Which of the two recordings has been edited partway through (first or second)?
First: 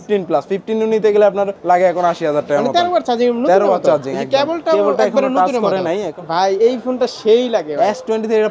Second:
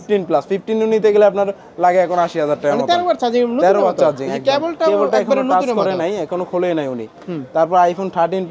first